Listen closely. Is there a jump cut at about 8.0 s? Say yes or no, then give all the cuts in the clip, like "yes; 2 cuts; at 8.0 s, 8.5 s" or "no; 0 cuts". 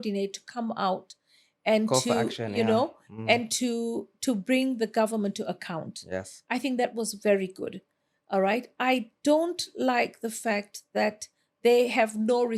no; 0 cuts